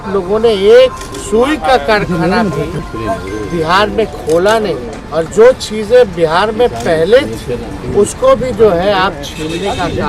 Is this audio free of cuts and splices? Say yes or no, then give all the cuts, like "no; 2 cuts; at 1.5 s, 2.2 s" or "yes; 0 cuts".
no; 4 cuts; at 1.1 s, 2.8 s, 5.0 s, 7.7 s